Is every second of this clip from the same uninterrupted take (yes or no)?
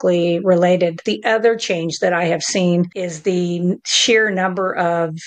no